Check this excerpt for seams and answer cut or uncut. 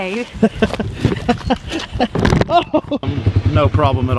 cut